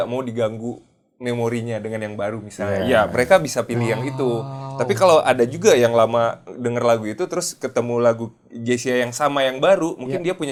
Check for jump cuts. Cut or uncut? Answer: uncut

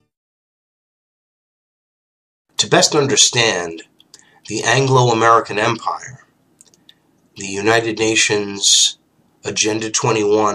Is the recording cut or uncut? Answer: cut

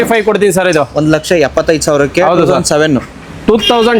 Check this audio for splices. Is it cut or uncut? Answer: uncut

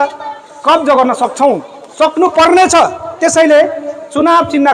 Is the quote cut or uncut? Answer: uncut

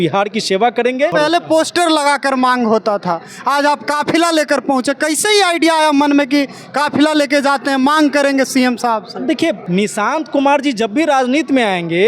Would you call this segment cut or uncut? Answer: cut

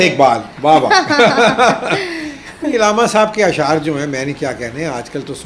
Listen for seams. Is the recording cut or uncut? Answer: uncut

